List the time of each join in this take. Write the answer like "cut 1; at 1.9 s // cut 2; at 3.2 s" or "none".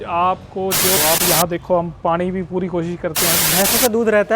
cut 1; at 1.0 s // cut 2; at 3.4 s